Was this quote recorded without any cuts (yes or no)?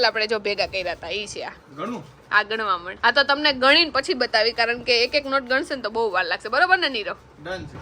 yes